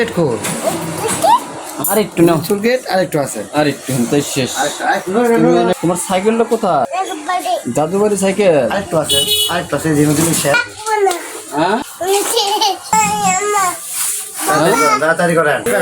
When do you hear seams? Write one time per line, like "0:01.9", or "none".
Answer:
0:12.9